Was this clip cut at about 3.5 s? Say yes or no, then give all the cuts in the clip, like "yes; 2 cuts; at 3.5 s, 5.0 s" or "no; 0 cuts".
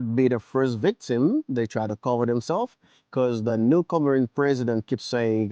yes; 1 cut; at 3.5 s